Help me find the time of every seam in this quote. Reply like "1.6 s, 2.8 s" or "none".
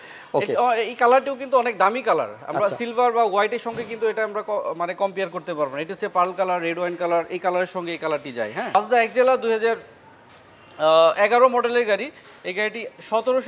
8.7 s